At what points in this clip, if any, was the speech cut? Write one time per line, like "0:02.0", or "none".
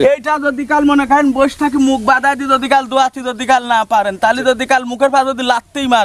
none